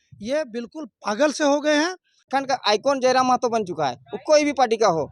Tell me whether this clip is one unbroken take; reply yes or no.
no